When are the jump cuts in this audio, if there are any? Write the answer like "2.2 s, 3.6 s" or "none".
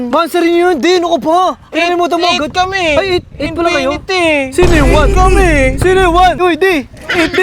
6.4 s